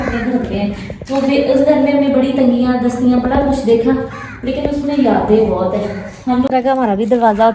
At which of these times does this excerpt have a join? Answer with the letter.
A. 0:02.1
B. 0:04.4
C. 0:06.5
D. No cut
C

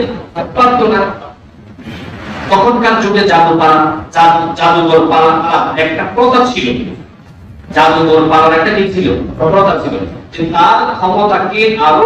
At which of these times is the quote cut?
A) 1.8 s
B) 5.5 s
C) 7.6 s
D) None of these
B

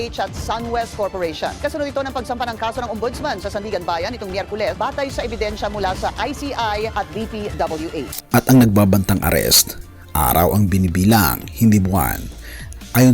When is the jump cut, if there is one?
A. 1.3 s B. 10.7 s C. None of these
A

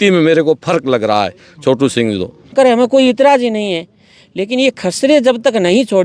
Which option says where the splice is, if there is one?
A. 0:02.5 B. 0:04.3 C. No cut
A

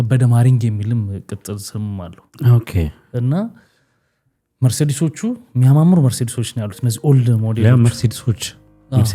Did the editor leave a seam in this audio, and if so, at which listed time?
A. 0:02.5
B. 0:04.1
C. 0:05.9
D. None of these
D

